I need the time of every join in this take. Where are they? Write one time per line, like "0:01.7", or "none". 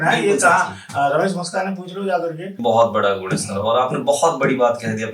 0:02.6